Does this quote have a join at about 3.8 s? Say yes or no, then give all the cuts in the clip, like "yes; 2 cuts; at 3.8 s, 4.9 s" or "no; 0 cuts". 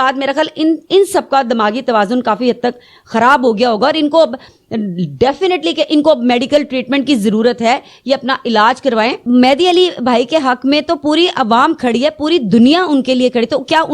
no; 1 cut; at 9.2 s